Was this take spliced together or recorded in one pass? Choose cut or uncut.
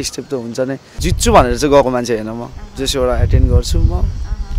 cut